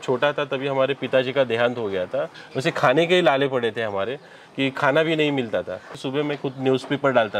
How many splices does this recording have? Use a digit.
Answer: 2